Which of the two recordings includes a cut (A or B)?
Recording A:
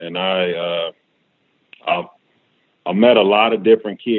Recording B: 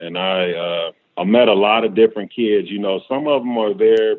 B